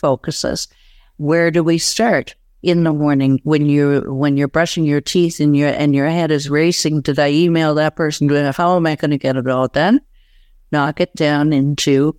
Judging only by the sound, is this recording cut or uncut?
uncut